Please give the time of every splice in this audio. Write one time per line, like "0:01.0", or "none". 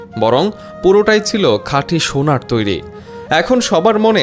none